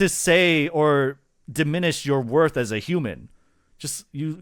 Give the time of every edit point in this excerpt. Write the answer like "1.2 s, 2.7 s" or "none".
none